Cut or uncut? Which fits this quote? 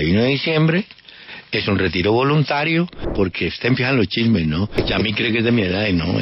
cut